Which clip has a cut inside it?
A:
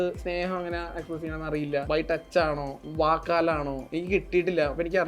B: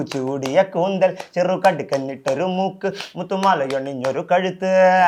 A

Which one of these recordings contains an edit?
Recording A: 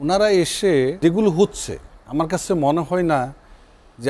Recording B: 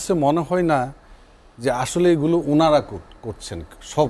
A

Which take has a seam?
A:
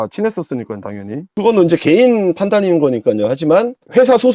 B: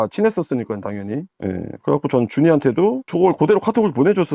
A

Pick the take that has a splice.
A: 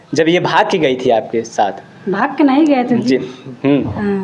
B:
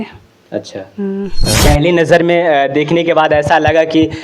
B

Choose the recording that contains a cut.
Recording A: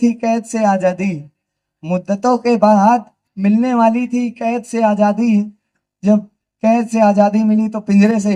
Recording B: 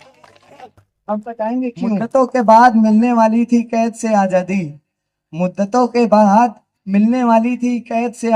B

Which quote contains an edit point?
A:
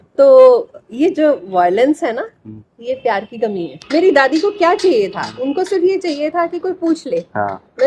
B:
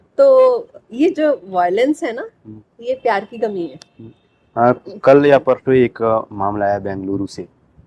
A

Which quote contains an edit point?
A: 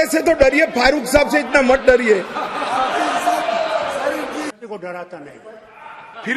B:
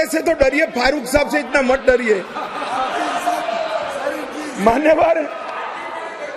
A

